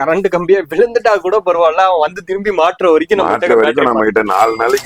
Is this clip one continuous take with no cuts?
yes; 0 cuts

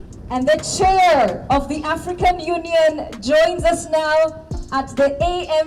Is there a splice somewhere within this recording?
no; 0 cuts

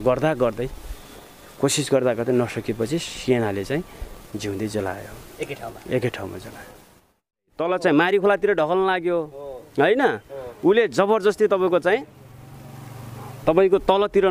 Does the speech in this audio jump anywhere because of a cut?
yes; 1 cut; at 7.3 s

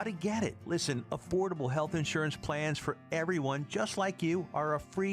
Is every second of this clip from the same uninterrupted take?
yes; 0 cuts

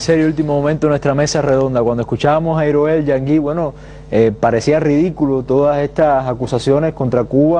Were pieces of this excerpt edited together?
no; 0 cuts

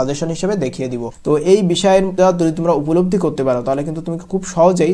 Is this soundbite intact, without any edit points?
no; 2 cuts; at 1.1 s, 2.1 s

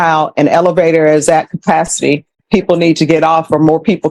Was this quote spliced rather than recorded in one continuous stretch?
no; 0 cuts

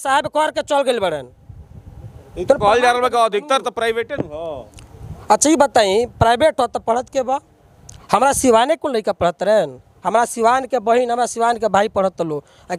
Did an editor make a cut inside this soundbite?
no; 0 cuts

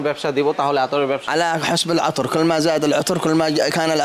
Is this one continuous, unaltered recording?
no; 1 cut; at 1.2 s

